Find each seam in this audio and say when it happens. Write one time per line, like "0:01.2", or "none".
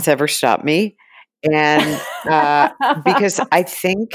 none

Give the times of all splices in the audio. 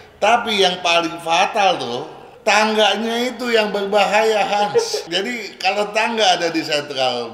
0:02.3
0:05.0

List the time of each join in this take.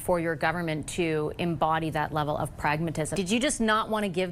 0:03.1

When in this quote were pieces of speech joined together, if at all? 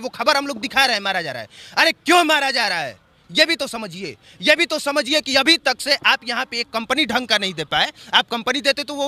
none

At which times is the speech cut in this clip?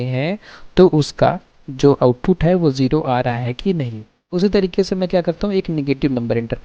0:04.3

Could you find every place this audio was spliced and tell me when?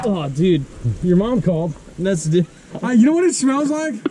0:02.6

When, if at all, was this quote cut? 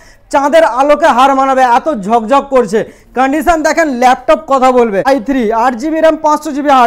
0:05.1

